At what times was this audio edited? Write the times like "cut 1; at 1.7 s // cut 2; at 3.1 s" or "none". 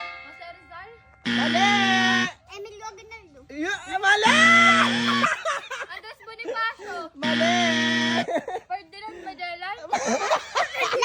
none